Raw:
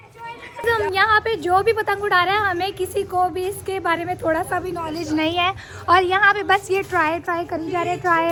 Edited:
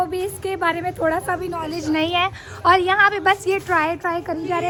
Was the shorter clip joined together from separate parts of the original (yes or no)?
no